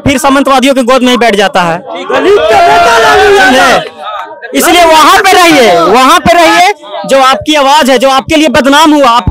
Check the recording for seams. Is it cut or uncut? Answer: uncut